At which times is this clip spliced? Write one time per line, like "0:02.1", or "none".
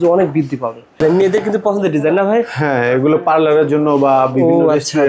0:01.0